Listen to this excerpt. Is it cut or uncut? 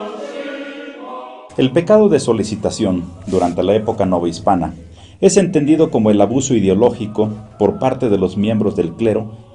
cut